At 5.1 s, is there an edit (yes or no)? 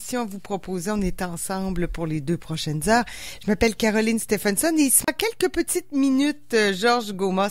yes